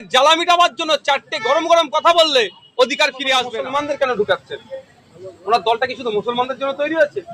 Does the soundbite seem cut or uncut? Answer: cut